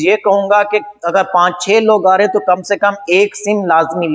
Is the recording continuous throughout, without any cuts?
yes; 0 cuts

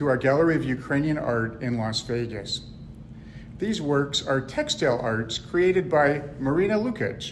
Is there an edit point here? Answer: no; 0 cuts

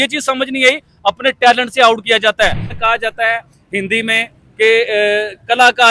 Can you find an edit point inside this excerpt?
yes; 1 cut; at 2.6 s

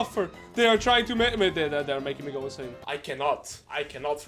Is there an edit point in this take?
yes; 1 cut; at 2.7 s

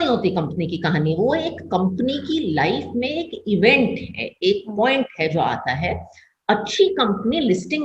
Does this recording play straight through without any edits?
yes; 0 cuts

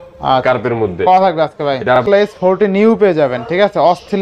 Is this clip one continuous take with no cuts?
no; 1 cut; at 2.0 s

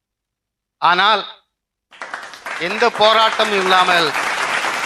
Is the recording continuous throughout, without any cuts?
yes; 0 cuts

